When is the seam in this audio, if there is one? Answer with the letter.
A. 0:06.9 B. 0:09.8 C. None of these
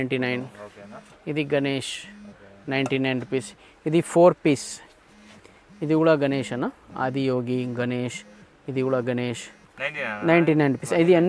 C